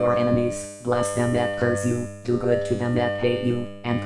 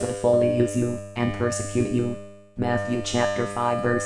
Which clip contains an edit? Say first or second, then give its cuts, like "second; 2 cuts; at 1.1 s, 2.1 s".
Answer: second; 1 cut; at 2.4 s